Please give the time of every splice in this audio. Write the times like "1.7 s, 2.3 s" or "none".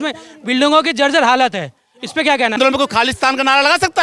2.6 s